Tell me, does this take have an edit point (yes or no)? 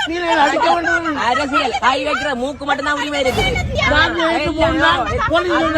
yes